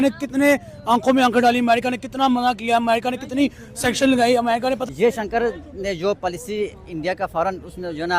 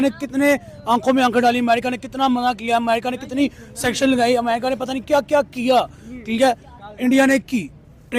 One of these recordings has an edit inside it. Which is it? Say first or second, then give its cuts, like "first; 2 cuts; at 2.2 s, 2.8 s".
first; 1 cut; at 4.9 s